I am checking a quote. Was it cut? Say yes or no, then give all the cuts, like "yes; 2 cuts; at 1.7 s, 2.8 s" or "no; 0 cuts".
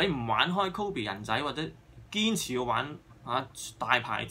no; 0 cuts